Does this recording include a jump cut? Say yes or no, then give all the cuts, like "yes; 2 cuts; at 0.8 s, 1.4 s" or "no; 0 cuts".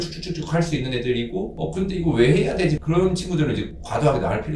no; 0 cuts